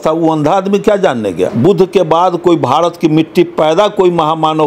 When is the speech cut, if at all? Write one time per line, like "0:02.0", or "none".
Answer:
0:01.5